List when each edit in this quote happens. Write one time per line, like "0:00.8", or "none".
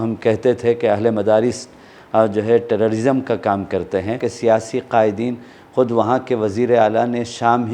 0:04.3